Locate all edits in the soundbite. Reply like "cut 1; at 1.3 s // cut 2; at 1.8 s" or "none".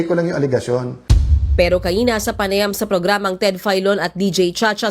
cut 1; at 0.9 s